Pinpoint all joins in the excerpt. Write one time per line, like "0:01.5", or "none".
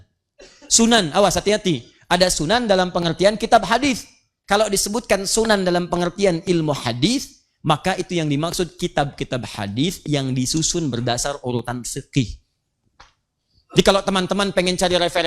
0:04.3